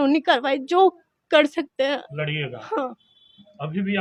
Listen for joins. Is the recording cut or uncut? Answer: uncut